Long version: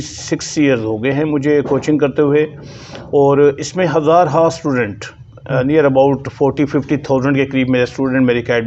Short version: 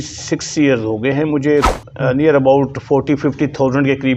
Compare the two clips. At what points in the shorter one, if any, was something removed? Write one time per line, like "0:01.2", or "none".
0:01.7